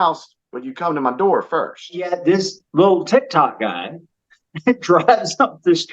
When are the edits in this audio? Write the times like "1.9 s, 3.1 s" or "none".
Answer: 2.1 s